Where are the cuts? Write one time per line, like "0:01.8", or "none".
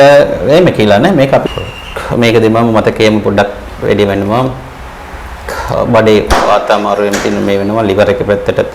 0:01.5